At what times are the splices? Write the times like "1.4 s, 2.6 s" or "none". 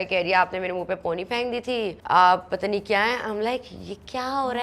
2.0 s

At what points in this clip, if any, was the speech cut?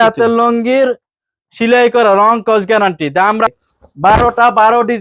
3.5 s

